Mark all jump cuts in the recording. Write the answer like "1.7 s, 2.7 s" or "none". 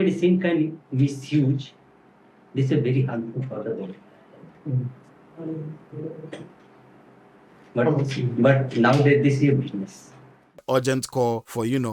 10.5 s